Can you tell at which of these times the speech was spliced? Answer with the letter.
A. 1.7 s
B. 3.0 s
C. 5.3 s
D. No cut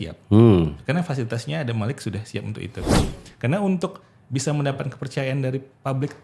B